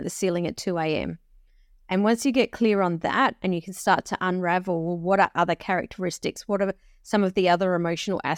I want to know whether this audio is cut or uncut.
uncut